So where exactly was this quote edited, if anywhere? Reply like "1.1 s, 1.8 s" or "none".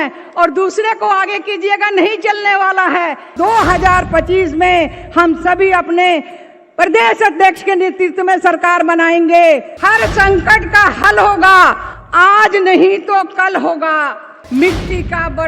3.3 s, 9.7 s, 14.4 s